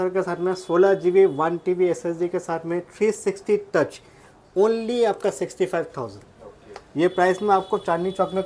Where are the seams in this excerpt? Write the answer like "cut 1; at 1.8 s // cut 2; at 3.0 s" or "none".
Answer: none

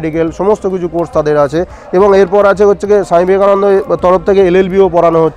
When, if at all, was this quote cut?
none

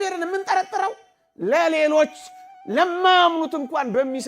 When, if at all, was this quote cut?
none

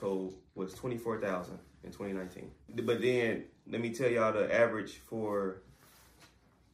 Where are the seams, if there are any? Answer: cut 1; at 2.7 s

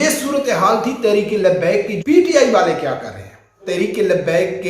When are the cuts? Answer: cut 1; at 1.9 s // cut 2; at 3.6 s

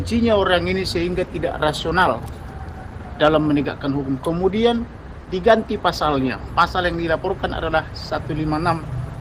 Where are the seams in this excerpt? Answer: none

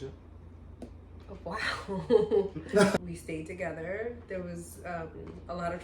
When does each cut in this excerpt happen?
cut 1; at 3.0 s

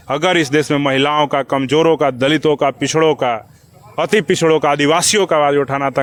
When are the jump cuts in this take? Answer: none

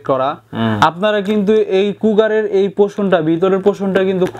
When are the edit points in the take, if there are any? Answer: none

